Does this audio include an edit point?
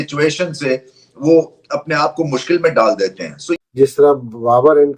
yes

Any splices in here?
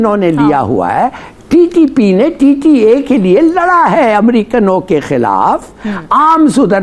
no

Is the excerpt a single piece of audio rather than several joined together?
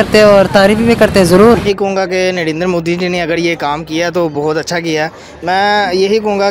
no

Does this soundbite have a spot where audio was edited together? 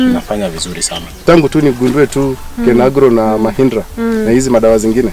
yes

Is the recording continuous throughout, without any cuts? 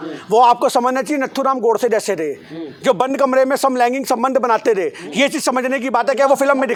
yes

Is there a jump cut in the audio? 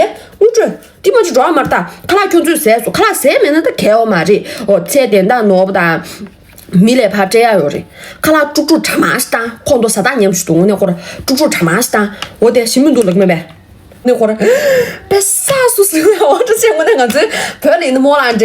yes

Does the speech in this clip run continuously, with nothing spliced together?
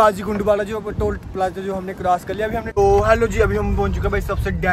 no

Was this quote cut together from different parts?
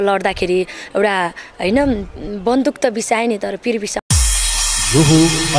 yes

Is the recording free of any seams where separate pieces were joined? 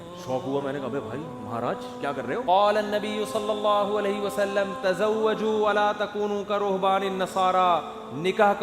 no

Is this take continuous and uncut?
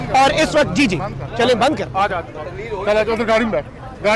yes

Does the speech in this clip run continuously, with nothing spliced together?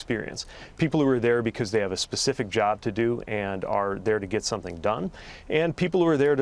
yes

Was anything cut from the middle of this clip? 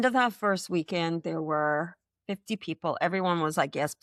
no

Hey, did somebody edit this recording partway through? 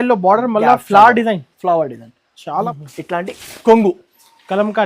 yes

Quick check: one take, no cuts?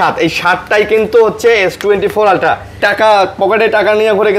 no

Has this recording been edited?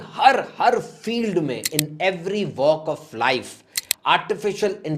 no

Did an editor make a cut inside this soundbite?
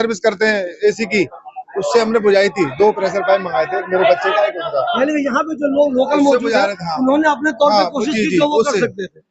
no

